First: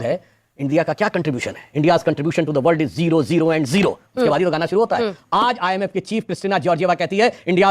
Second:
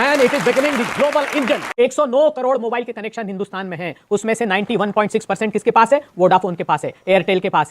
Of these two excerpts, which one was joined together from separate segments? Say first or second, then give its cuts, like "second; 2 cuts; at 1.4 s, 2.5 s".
second; 1 cut; at 1.7 s